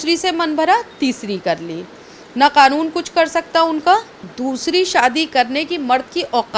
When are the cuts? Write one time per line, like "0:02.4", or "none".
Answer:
0:04.2